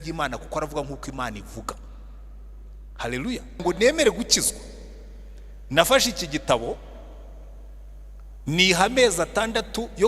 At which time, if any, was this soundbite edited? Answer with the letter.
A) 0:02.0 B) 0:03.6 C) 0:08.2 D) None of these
B